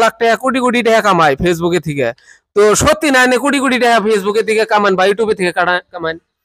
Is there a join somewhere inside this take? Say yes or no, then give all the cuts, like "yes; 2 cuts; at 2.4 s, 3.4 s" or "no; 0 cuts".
no; 0 cuts